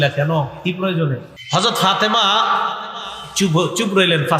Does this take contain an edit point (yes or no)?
yes